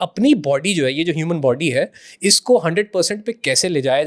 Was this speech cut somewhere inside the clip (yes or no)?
no